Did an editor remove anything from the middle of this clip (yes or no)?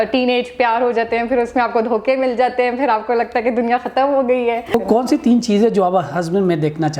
yes